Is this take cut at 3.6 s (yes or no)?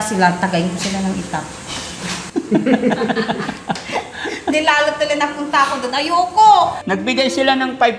no